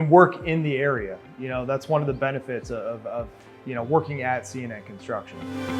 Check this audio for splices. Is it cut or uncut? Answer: uncut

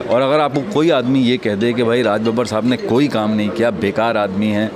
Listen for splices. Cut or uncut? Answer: uncut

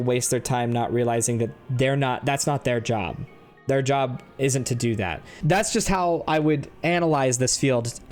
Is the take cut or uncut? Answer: cut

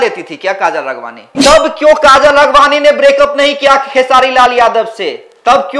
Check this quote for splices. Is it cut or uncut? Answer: cut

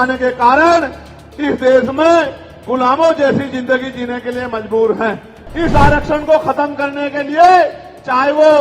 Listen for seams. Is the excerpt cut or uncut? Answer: cut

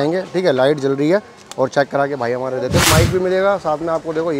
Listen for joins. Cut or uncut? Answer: cut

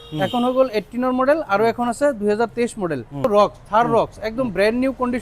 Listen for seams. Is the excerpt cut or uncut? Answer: cut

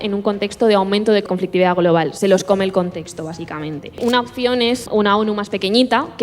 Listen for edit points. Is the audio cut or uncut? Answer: cut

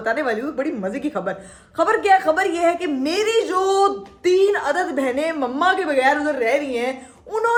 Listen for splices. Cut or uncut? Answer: uncut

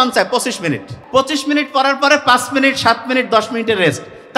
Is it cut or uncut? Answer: cut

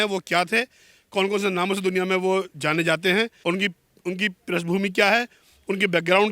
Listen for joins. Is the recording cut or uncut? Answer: cut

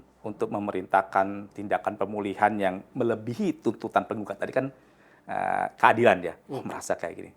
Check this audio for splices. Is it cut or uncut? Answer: uncut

